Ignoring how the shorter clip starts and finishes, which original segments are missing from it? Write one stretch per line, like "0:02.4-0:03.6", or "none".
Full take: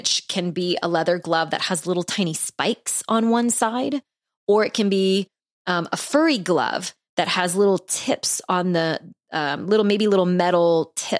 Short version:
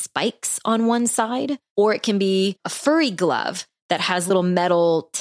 0:04.0-0:04.3
0:05.4-0:06.0
0:07.6-0:10.1